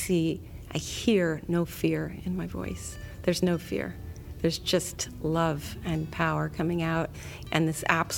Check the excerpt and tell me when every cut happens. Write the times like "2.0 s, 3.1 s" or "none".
none